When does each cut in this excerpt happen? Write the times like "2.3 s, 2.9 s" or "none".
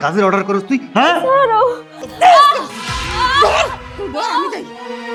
none